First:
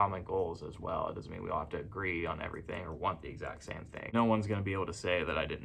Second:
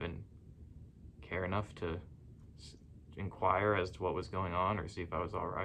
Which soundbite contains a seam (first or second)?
first